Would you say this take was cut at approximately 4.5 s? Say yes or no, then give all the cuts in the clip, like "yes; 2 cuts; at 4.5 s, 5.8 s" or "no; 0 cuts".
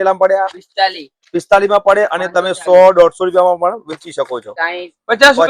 yes; 1 cut; at 4.5 s